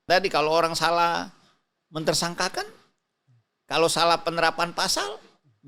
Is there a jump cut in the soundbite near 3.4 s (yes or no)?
no